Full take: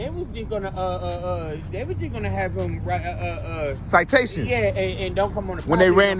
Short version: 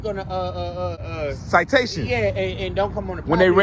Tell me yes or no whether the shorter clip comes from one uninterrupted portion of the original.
no